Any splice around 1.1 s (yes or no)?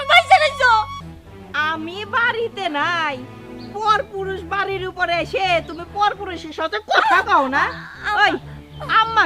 yes